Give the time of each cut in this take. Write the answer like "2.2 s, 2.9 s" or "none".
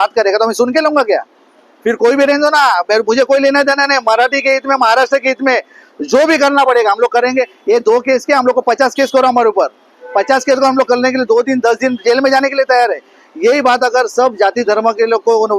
13.2 s